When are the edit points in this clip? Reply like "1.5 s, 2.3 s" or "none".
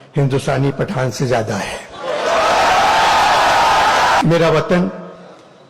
4.2 s